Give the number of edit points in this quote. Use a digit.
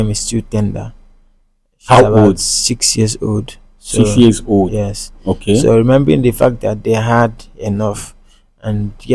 0